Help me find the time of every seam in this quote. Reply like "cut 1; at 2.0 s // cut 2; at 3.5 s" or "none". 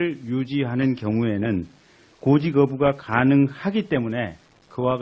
cut 1; at 3.7 s